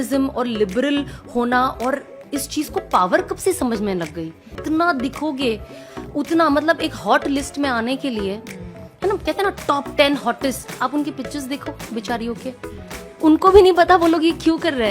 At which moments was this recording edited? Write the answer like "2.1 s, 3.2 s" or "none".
4.6 s